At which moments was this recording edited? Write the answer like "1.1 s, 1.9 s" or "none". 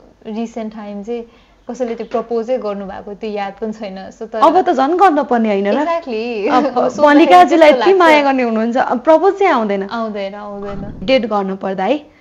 11.0 s